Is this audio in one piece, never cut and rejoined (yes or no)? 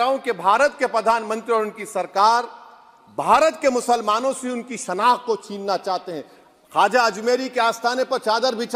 yes